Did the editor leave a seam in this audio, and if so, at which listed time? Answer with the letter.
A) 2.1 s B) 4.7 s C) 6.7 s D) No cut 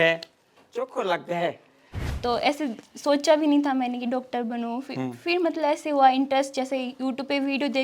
A